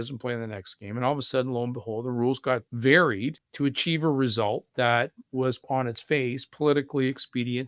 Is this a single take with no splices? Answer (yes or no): no